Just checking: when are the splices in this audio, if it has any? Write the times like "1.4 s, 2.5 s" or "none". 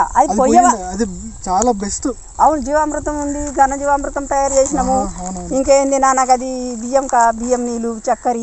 none